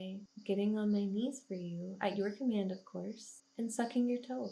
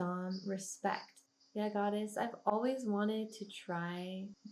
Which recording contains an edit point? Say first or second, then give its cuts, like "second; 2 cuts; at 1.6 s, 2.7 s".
second; 1 cut; at 1.2 s